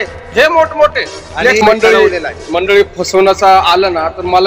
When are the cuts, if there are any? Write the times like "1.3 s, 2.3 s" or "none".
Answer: 1.6 s